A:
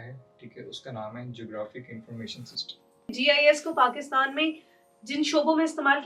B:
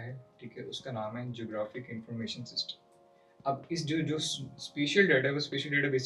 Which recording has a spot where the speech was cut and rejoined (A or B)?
A